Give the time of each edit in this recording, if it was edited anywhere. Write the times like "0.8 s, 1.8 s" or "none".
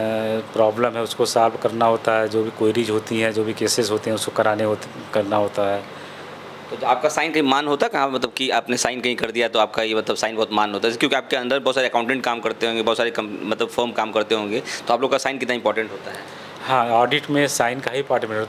none